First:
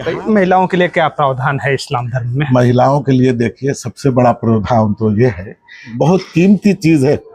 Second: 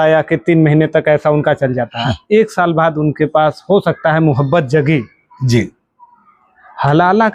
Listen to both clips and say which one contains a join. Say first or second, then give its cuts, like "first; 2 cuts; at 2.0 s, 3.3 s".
first; 1 cut; at 5.9 s